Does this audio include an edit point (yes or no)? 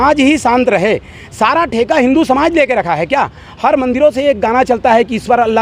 no